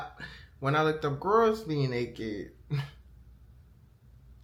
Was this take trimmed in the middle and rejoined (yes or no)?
no